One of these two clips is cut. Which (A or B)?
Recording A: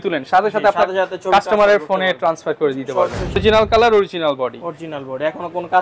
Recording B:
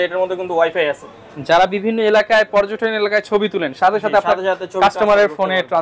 A